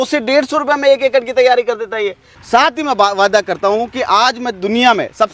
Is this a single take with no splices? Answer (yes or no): no